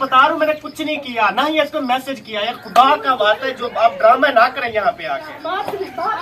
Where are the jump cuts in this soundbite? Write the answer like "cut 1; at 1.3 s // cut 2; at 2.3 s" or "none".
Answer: cut 1; at 4.8 s